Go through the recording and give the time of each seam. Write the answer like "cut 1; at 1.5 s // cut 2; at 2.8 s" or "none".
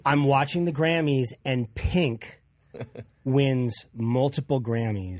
none

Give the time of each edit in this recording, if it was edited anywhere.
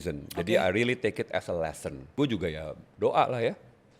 cut 1; at 2.2 s

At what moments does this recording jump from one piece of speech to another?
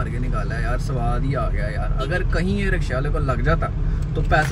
none

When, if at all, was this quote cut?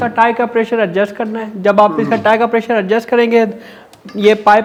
none

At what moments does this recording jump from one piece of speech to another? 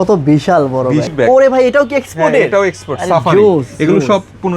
cut 1; at 1.1 s

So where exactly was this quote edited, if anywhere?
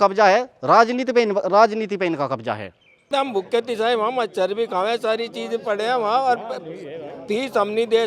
cut 1; at 3.1 s

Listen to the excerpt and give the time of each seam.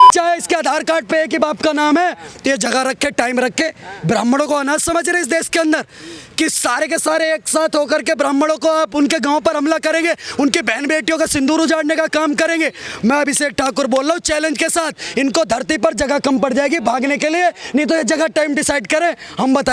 none

